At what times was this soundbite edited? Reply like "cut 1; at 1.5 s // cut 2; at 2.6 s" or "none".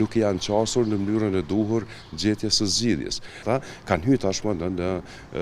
cut 1; at 3.4 s